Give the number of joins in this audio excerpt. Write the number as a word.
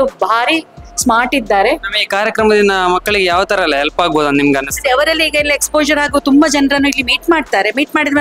zero